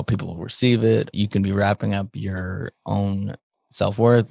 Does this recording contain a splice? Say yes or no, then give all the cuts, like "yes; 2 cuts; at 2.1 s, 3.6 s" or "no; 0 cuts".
yes; 1 cut; at 1.1 s